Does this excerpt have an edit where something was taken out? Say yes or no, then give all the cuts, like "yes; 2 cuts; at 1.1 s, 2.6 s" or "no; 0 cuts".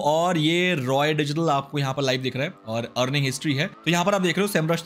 no; 0 cuts